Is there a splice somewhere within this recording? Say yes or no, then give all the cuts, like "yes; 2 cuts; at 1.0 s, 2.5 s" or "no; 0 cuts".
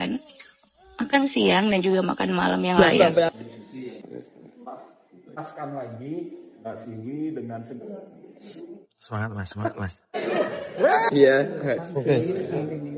yes; 1 cut; at 2.8 s